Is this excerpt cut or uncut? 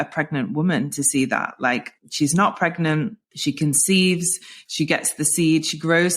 cut